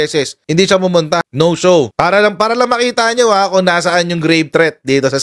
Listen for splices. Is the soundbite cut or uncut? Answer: cut